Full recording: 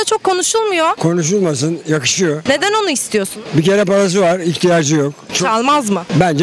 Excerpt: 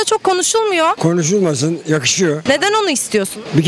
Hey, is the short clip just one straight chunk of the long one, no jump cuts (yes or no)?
yes